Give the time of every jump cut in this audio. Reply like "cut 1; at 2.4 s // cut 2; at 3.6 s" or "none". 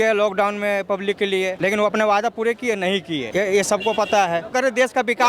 cut 1; at 1.6 s // cut 2; at 3.3 s // cut 3; at 4.5 s